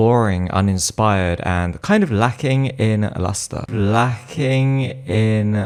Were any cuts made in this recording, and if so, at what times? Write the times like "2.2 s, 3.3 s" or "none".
none